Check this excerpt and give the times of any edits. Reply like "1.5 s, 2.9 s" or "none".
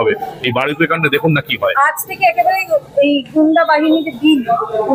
none